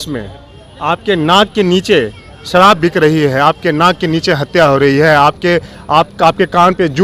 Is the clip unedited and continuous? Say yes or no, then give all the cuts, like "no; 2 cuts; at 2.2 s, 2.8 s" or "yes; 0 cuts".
yes; 0 cuts